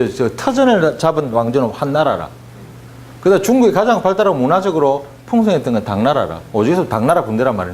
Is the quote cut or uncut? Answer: cut